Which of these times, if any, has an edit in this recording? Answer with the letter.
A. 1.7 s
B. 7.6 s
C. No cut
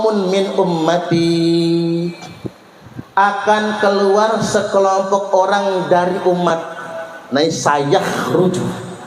C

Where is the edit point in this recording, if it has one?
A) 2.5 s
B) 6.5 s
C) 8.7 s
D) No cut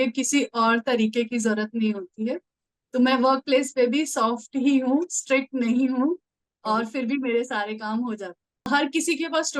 C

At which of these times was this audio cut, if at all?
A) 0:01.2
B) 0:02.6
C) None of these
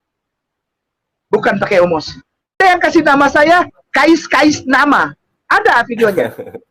B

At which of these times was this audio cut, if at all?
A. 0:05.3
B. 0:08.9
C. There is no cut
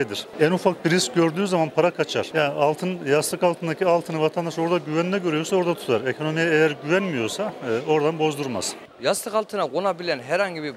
C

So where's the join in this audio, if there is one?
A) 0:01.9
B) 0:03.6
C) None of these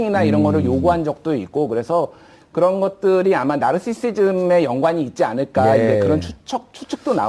B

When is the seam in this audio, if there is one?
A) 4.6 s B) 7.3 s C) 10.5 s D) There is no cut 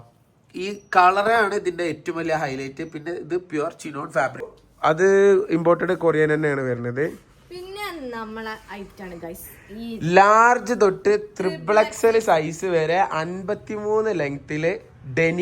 A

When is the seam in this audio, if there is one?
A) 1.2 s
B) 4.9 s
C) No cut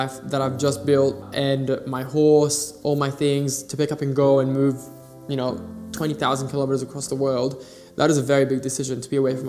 A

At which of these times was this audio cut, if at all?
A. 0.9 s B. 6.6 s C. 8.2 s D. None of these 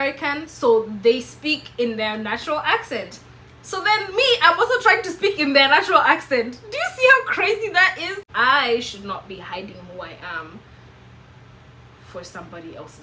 C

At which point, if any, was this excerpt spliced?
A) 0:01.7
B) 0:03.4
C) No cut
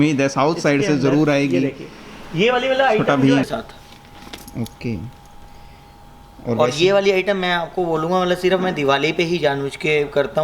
B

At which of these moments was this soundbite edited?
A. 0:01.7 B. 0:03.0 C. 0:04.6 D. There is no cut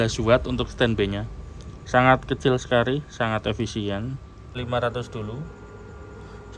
C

